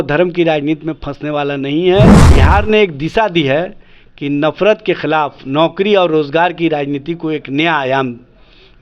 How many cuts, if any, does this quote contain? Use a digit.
1